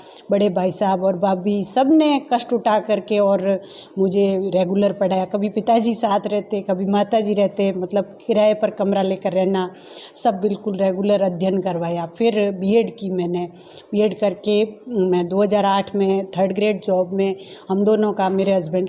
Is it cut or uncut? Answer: uncut